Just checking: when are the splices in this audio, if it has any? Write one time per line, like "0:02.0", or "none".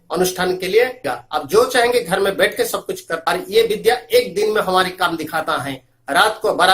0:01.1
0:03.2